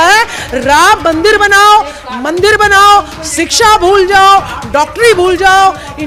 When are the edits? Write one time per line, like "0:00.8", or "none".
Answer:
none